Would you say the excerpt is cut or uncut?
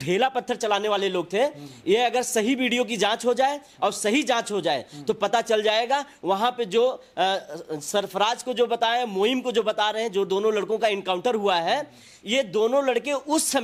uncut